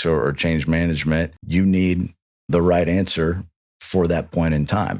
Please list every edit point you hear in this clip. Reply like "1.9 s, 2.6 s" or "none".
1.4 s